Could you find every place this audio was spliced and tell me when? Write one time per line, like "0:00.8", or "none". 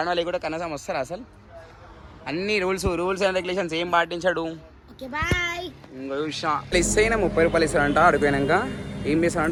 none